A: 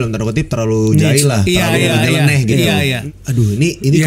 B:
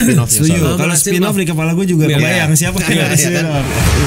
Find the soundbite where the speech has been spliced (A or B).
A